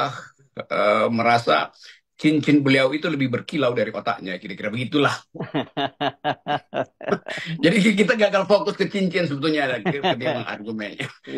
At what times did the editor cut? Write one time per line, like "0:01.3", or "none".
0:06.2